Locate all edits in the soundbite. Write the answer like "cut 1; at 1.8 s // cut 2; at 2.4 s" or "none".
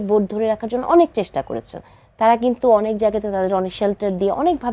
none